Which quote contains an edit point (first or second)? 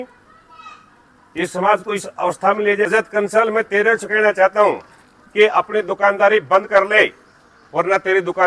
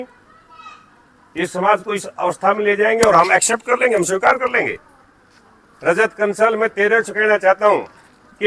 first